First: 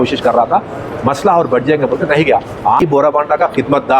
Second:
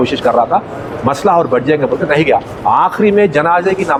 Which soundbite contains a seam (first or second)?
first